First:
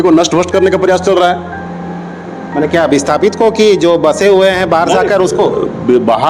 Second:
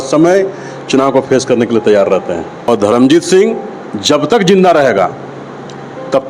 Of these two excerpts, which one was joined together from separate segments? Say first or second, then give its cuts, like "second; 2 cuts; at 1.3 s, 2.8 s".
second; 1 cut; at 2.6 s